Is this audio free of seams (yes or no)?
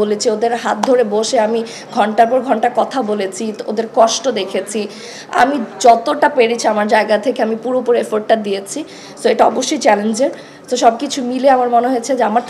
yes